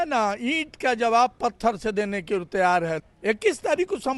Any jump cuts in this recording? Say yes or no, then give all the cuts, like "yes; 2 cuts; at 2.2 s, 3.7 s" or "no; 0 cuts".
yes; 1 cut; at 3.0 s